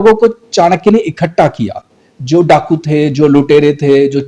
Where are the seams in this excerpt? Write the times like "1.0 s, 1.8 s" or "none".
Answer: none